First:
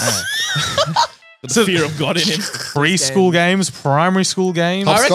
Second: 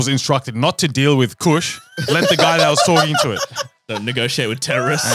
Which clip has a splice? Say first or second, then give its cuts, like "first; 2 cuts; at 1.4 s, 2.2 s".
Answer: first; 1 cut; at 2.7 s